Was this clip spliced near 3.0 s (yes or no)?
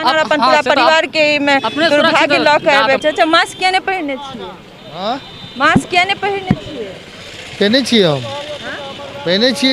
yes